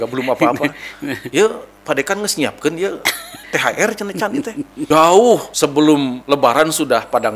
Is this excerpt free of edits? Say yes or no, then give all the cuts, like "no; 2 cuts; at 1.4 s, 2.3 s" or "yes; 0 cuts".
no; 4 cuts; at 3.4 s, 4.8 s, 5.5 s, 6.2 s